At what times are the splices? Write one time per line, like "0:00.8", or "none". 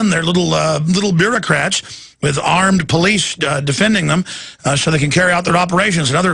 0:01.3

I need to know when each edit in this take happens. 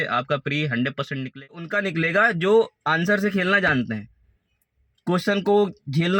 0:01.5

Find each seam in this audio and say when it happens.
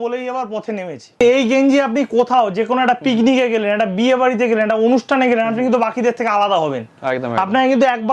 0:01.2

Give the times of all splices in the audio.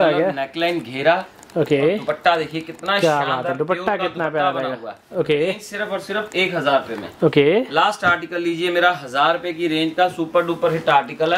none

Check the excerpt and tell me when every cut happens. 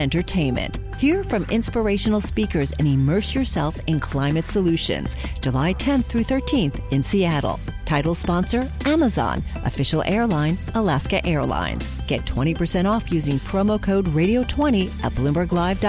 none

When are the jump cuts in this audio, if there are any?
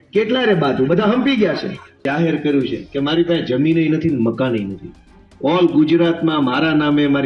0:02.0

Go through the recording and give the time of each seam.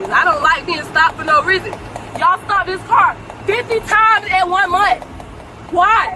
none

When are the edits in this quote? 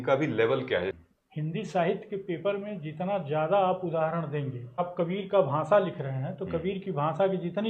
0:00.9
0:04.8

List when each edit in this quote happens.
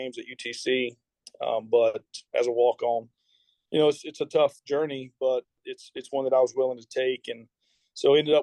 none

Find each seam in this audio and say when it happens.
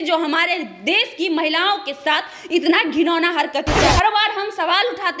0:03.8

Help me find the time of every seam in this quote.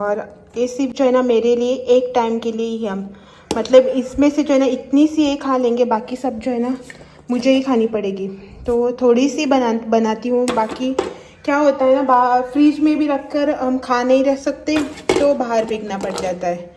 none

